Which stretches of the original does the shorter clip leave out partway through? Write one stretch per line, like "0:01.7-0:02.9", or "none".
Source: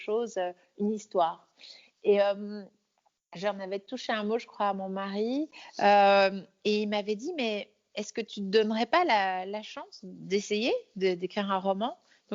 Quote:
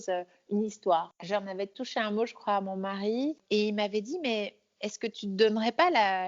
0:01.4-0:03.3
0:05.5-0:06.5